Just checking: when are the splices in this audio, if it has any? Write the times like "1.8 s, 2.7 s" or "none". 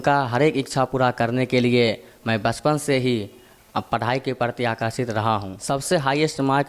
5.5 s